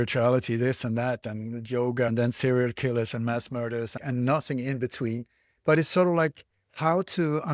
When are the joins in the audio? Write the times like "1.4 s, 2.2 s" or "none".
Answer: 2.1 s, 4.0 s, 5.5 s